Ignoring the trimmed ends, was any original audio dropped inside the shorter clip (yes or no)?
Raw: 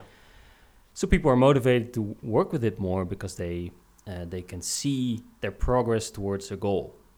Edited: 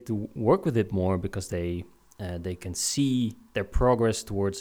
no